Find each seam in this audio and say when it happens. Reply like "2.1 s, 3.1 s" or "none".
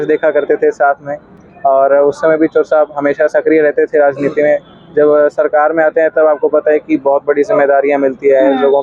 none